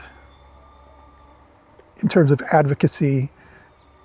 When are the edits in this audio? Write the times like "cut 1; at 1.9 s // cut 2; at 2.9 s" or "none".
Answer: none